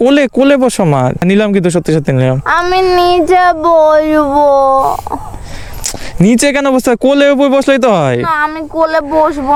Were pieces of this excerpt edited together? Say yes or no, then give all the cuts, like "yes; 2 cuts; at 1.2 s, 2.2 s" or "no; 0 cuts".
no; 0 cuts